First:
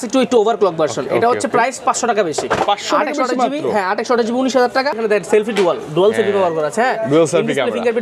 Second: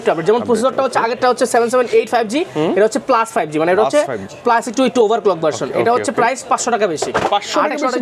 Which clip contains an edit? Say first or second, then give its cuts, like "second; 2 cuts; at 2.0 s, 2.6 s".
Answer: first; 1 cut; at 5.0 s